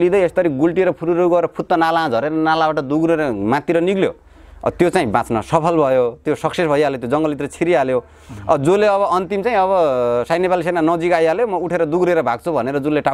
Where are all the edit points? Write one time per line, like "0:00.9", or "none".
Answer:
none